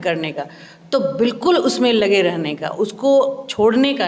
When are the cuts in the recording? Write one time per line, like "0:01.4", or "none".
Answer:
none